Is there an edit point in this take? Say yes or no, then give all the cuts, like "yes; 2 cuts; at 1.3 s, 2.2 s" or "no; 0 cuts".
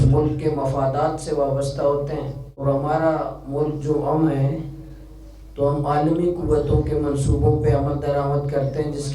yes; 1 cut; at 2.6 s